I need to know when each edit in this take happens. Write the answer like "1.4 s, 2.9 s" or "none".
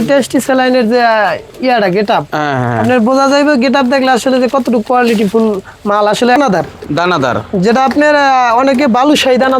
6.4 s